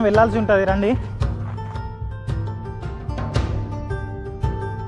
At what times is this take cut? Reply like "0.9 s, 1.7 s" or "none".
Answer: none